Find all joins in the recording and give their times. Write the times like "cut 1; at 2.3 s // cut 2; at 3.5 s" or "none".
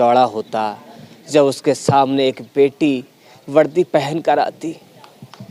none